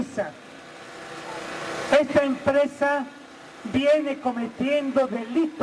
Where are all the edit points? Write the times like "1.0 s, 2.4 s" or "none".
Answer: 4.7 s